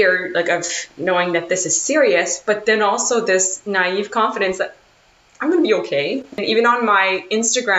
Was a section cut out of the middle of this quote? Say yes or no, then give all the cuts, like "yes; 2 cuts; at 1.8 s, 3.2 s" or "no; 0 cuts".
yes; 1 cut; at 6.4 s